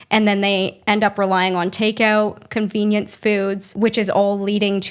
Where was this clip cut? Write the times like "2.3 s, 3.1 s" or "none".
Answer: 3.7 s